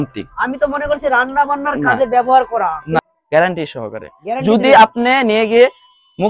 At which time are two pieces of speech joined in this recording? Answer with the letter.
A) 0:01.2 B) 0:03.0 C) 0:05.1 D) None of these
B